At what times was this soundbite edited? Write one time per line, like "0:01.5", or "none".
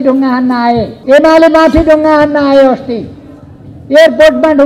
0:00.9

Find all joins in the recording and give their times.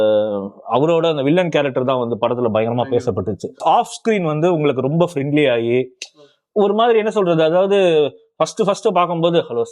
0:03.6

